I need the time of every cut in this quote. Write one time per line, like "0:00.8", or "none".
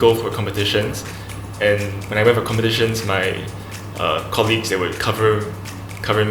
none